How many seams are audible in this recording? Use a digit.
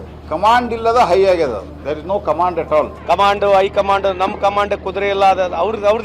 1